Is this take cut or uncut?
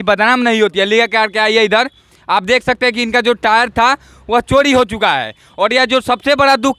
uncut